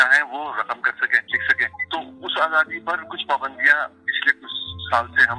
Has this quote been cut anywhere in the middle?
yes; 2 cuts; at 1.7 s, 3.1 s

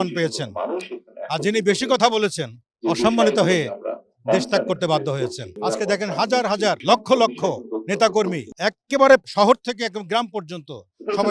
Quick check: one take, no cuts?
no; 4 cuts; at 5.5 s, 6.8 s, 8.5 s, 9.3 s

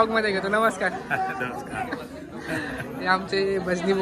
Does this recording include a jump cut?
no; 0 cuts

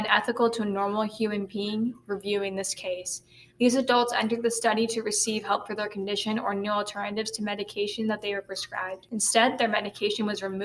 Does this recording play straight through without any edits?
no; 1 cut; at 9.0 s

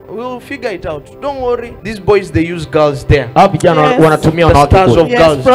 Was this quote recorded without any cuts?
no; 1 cut; at 1.8 s

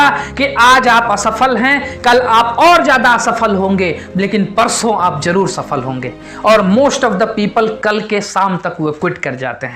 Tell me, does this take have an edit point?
no; 0 cuts

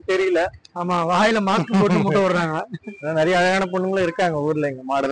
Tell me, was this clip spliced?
no; 0 cuts

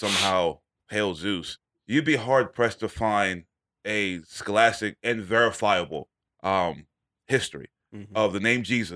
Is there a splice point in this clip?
yes; 1 cut; at 1.6 s

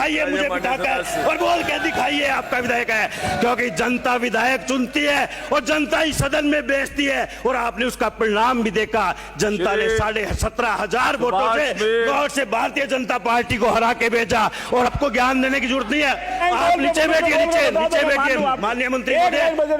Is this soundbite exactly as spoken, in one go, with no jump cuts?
no; 1 cut; at 14.9 s

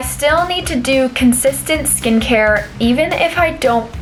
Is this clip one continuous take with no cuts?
yes; 0 cuts

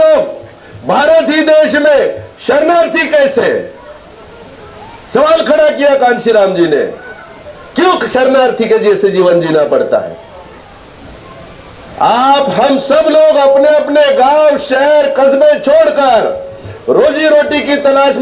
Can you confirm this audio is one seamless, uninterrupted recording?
yes; 0 cuts

